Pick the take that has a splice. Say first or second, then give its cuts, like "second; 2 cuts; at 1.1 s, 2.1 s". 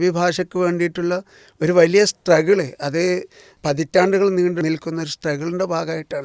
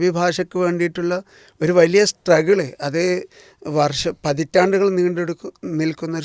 first; 2 cuts; at 3.6 s, 4.6 s